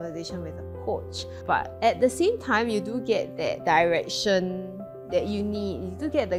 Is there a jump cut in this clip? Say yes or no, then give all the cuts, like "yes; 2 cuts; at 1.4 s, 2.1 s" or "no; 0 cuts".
no; 0 cuts